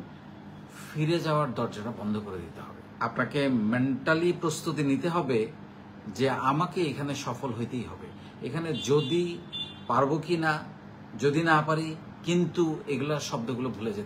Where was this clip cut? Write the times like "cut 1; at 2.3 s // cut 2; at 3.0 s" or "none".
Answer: cut 1; at 2.8 s